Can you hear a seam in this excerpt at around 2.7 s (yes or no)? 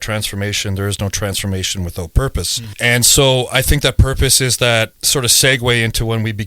yes